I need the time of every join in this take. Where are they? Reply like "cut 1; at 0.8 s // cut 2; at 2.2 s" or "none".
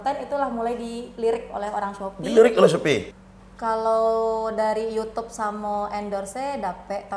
cut 1; at 3.1 s